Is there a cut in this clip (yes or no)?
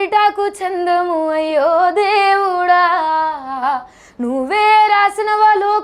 no